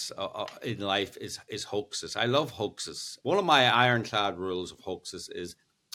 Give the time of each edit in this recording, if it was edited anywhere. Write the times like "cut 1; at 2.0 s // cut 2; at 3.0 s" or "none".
cut 1; at 3.0 s

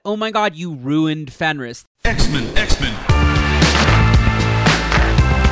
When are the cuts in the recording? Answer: cut 1; at 1.8 s

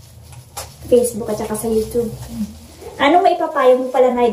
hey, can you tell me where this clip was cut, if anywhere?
cut 1; at 2.4 s

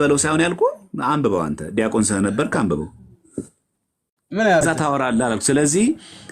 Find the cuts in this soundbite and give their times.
cut 1; at 4.6 s

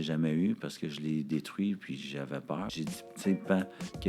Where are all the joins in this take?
cut 1; at 2.7 s

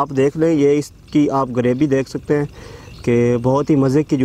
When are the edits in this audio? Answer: none

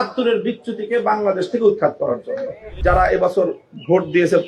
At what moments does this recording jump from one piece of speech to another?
cut 1; at 2.7 s

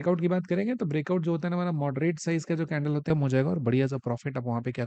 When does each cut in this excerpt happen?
cut 1; at 3.1 s

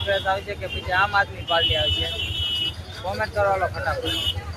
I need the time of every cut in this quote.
none

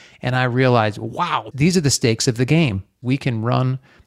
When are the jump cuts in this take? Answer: cut 1; at 1.4 s // cut 2; at 3.0 s

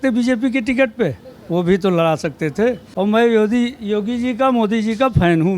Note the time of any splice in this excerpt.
cut 1; at 2.9 s

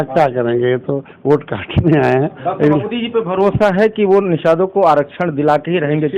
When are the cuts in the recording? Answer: cut 1; at 2.9 s

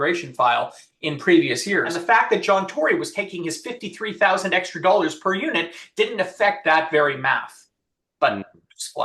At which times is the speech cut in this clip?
cut 1; at 1.9 s

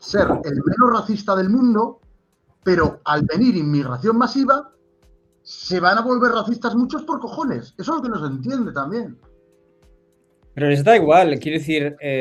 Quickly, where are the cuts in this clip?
none

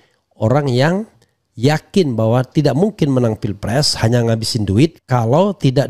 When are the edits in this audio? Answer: cut 1; at 5.0 s

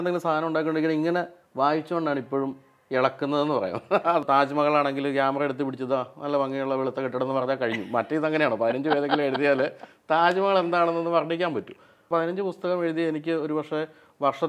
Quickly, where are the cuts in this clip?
cut 1; at 4.2 s // cut 2; at 12.0 s

